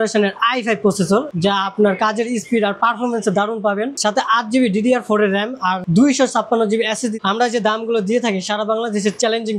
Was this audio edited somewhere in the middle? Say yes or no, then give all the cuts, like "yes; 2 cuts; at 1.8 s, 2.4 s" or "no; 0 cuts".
yes; 4 cuts; at 1.3 s, 3.9 s, 5.8 s, 7.2 s